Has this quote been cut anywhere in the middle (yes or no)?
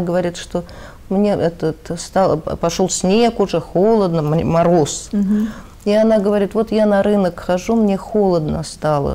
no